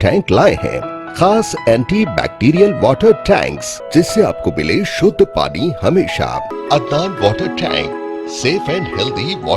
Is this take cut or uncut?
cut